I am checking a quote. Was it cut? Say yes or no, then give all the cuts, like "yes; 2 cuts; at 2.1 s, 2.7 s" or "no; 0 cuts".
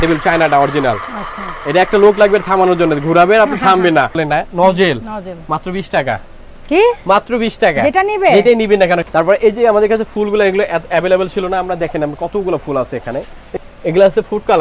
yes; 3 cuts; at 4.2 s, 9.0 s, 13.4 s